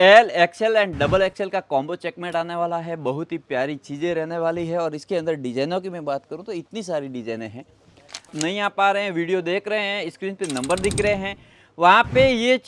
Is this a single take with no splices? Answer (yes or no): no